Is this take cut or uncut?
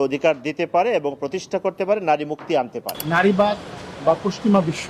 cut